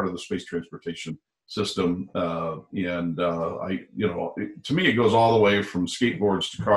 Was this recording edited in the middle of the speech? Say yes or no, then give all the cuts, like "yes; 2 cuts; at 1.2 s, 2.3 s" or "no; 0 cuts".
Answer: no; 0 cuts